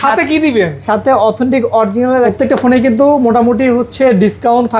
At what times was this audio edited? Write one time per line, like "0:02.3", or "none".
0:02.3